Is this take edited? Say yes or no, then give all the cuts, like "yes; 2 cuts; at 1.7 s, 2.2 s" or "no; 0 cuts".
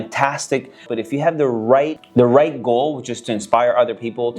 yes; 2 cuts; at 0.8 s, 2.0 s